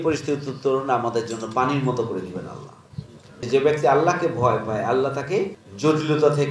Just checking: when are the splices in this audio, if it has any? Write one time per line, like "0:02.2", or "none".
0:03.5
0:05.6